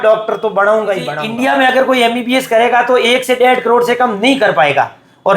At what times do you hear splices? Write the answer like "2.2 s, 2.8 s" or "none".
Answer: 1.2 s